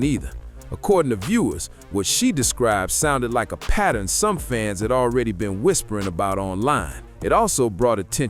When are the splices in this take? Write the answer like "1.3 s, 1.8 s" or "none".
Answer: none